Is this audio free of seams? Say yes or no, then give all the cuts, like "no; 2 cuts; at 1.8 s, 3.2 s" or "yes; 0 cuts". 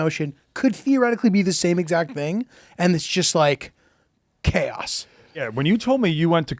no; 1 cut; at 5.4 s